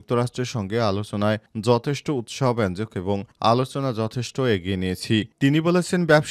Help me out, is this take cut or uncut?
uncut